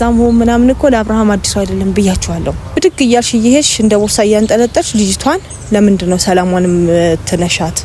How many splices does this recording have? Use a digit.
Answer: 1